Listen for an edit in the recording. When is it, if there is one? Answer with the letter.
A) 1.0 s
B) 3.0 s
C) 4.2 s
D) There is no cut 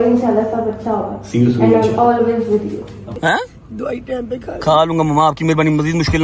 B